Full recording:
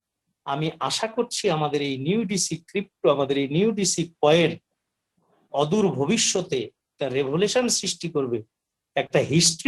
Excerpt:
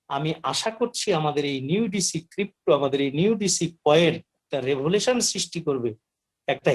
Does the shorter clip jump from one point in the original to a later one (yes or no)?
yes